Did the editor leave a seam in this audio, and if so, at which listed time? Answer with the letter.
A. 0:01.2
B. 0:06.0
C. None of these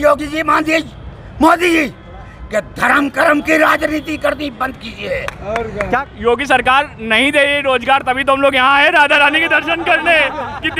B